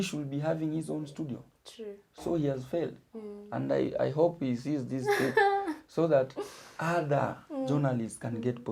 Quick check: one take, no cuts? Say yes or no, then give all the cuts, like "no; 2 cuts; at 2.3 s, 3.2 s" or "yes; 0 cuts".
yes; 0 cuts